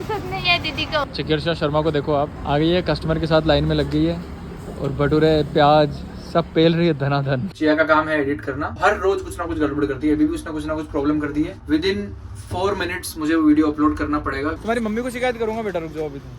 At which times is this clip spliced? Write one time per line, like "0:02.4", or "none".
0:01.1
0:07.4
0:14.6